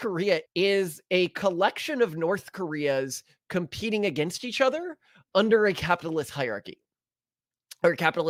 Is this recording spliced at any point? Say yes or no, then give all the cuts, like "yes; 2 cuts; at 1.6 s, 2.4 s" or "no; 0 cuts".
no; 0 cuts